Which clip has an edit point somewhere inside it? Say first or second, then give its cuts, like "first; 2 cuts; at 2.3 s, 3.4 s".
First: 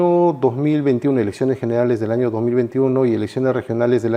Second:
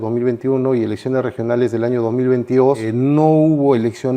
second; 1 cut; at 2.9 s